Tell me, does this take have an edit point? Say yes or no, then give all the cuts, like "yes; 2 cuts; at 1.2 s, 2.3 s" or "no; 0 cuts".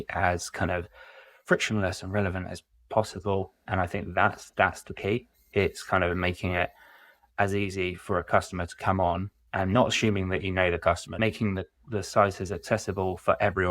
yes; 3 cuts; at 3.6 s, 9.3 s, 11.2 s